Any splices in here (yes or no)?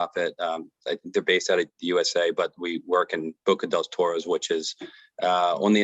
no